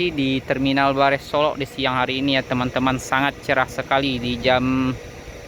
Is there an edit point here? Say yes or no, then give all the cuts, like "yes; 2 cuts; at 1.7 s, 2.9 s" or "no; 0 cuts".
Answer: no; 0 cuts